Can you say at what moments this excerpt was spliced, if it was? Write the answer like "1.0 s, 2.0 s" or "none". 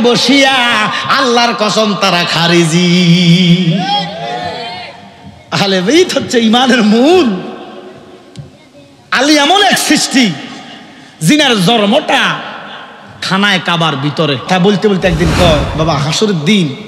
14.5 s

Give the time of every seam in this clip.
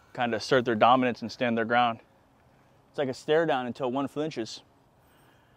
none

